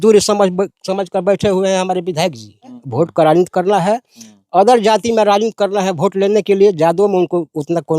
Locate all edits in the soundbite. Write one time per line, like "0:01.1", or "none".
0:02.8